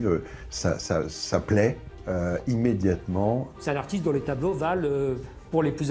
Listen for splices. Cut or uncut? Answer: cut